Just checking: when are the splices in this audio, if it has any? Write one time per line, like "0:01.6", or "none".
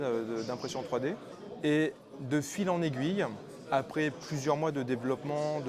0:01.3

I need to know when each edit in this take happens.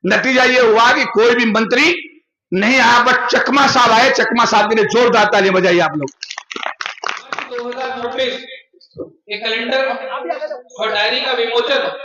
0:07.5

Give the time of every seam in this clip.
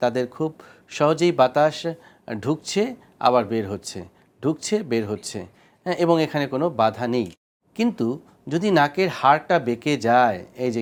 none

